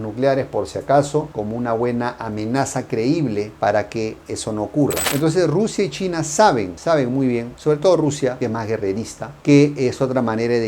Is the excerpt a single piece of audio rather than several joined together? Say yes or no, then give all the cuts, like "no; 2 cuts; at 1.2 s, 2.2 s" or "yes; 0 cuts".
no; 1 cut; at 5.0 s